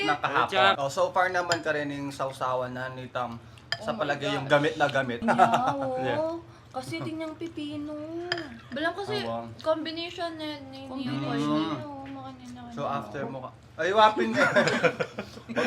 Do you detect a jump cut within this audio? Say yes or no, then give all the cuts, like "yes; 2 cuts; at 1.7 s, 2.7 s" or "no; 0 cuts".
yes; 2 cuts; at 0.8 s, 5.2 s